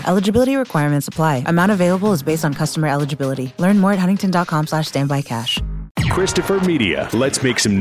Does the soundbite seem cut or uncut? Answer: cut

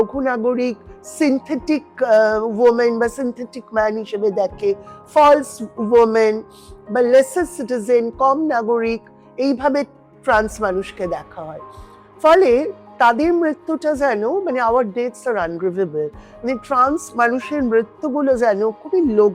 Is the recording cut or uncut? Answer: uncut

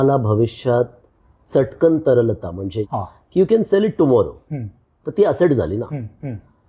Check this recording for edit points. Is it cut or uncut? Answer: cut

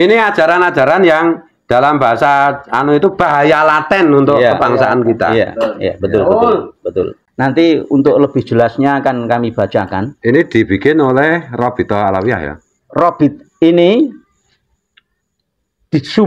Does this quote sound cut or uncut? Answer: cut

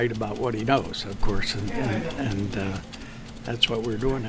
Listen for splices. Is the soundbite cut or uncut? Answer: uncut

